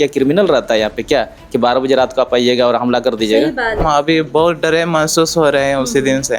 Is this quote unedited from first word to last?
no; 1 cut; at 3.8 s

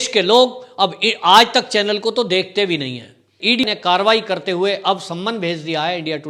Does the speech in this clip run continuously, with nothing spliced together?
no; 1 cut; at 3.6 s

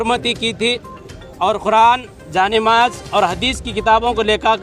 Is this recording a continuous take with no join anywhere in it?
yes; 0 cuts

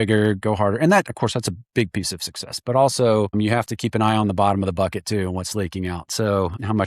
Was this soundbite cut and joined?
no; 0 cuts

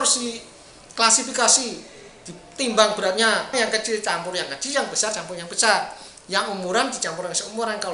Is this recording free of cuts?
no; 1 cut; at 3.5 s

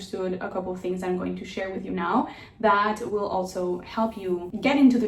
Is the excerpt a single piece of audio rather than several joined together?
yes; 0 cuts

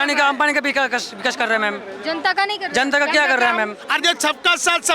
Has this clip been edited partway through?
yes; 1 cut; at 3.8 s

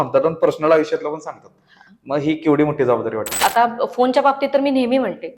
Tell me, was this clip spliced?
yes; 1 cut; at 3.3 s

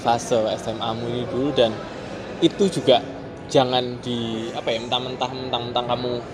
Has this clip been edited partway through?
no; 0 cuts

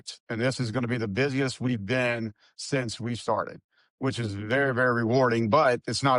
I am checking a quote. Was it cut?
no; 0 cuts

